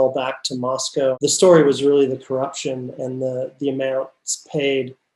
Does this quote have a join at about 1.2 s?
yes; 1 cut; at 1.2 s

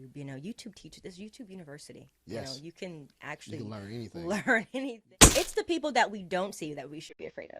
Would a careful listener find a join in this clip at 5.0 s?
yes; 1 cut; at 5.0 s

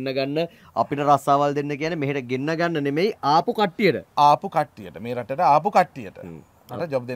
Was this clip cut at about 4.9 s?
no; 0 cuts

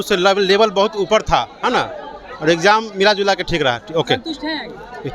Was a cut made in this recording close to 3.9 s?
no; 0 cuts

